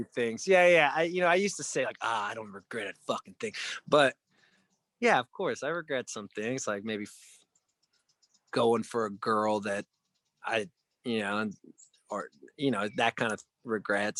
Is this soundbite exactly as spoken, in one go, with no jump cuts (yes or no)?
yes